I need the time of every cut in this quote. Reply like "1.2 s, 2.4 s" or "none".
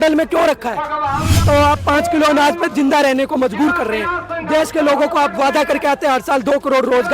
1.4 s